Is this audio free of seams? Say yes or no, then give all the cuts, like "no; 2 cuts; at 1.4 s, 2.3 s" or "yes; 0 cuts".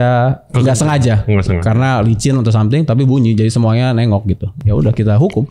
no; 1 cut; at 4.5 s